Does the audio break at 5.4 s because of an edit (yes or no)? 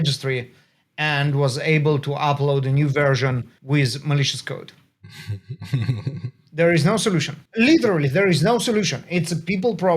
no